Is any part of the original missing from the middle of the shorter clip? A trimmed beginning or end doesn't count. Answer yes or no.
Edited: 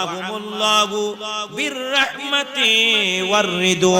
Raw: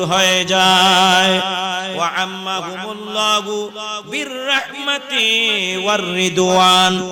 no